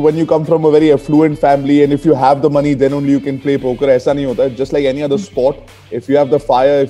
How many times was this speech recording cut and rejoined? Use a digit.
0